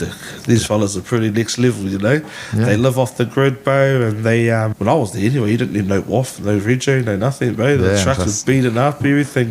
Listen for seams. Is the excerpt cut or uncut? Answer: cut